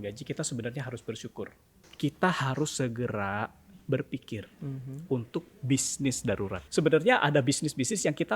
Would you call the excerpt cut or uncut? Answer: cut